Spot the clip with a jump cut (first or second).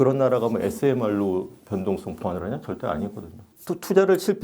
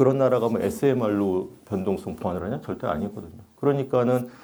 first